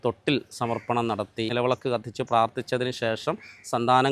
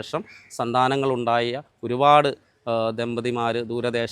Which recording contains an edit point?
first; 1 cut; at 1.5 s

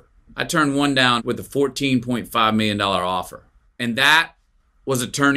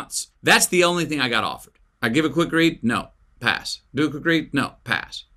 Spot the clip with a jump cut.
first; 1 cut; at 1.2 s

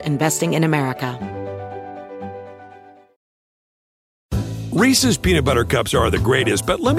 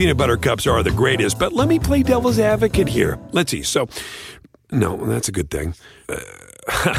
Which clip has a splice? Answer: first; 1 cut; at 1.1 s

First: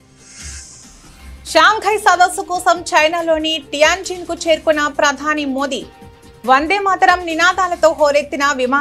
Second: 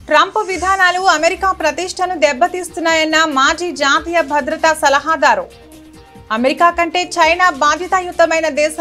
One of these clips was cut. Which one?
first; 1 cut; at 1.1 s

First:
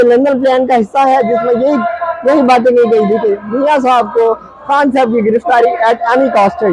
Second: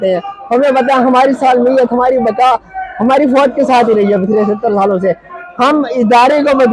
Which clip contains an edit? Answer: second; 1 cut; at 5.3 s

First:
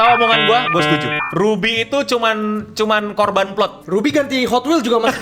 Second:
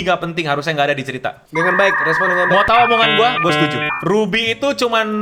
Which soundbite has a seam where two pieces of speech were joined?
first; 1 cut; at 3.8 s

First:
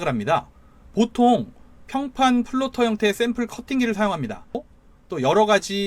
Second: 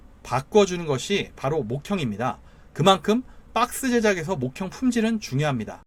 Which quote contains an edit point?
first; 1 cut; at 4.7 s

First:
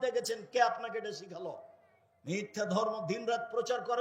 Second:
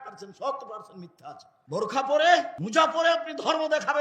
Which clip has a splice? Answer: second; 2 cuts; at 1.5 s, 2.6 s

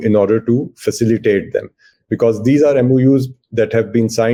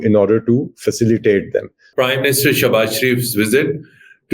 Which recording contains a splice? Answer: second; 1 cut; at 1.8 s

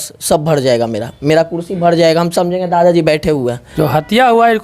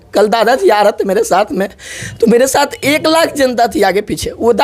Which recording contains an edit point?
first; 1 cut; at 3.5 s

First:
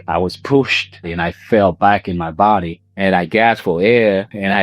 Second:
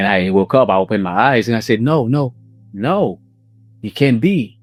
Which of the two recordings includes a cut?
first; 2 cuts; at 1.0 s, 2.8 s

